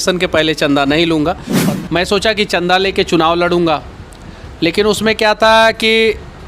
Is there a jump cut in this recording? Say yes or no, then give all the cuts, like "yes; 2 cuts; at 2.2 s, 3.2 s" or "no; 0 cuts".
yes; 1 cut; at 1.5 s